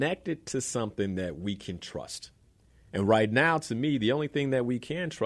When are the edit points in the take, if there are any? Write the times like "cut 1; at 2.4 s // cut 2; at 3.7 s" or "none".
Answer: none